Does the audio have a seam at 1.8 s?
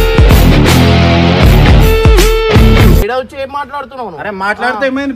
no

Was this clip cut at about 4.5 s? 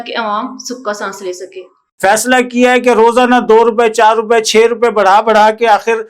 no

